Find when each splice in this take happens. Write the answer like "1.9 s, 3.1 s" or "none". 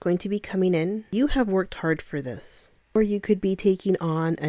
1.0 s, 3.0 s

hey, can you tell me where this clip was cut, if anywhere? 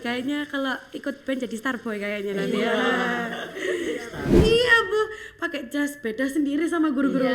4.3 s

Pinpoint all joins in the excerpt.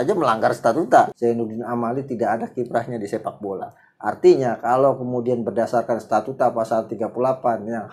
1.1 s

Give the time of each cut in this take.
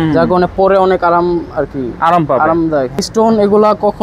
3.0 s

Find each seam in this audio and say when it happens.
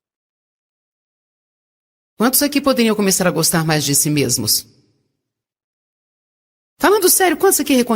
none

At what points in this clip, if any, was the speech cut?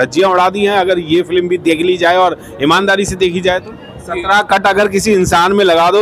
4.1 s

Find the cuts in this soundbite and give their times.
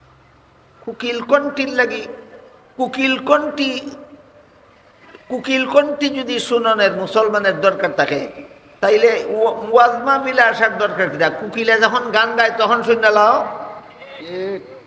none

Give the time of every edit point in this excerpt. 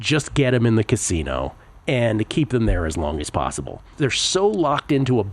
3.9 s

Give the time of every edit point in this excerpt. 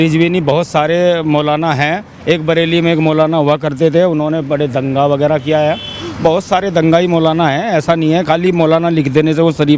none

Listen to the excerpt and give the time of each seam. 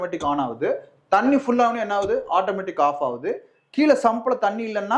none

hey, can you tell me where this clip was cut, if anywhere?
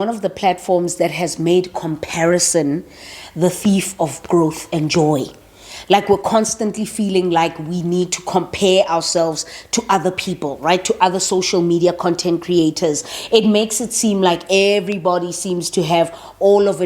none

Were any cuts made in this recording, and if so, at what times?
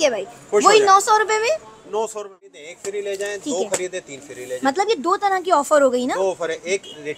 2.7 s

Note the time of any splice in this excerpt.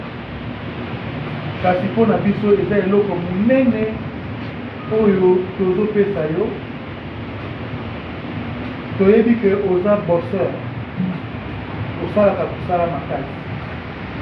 none

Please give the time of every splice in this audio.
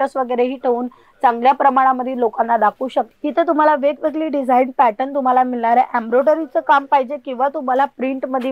3.1 s

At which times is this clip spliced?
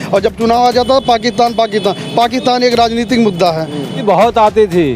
4.0 s

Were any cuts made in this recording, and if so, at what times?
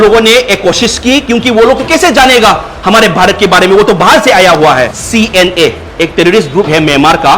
5.0 s

